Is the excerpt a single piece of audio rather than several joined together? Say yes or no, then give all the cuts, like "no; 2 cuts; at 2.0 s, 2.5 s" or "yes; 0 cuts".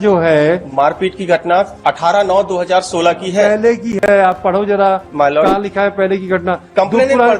yes; 0 cuts